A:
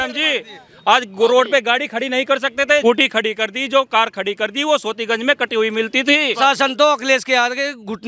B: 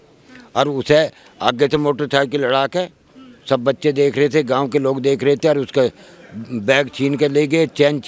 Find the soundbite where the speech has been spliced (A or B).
A